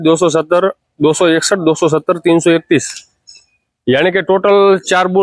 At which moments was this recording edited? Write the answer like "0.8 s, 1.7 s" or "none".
none